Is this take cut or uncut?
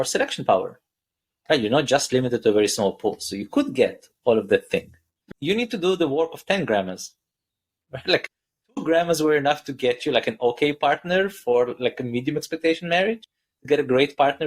cut